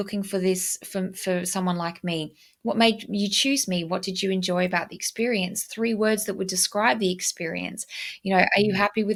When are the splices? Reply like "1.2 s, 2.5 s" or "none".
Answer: none